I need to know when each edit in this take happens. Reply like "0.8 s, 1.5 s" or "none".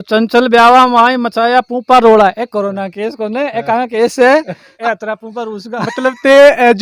4.6 s